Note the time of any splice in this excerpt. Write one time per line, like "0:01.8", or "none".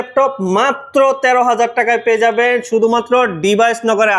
none